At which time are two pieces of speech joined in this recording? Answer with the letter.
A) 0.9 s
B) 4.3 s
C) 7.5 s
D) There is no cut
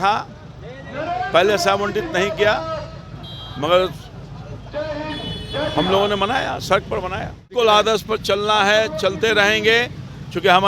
C